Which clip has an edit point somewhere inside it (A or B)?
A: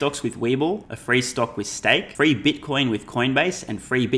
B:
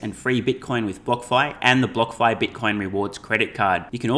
A